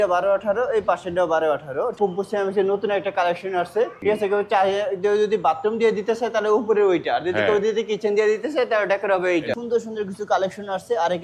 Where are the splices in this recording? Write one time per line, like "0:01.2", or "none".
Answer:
0:01.9
0:04.0
0:09.5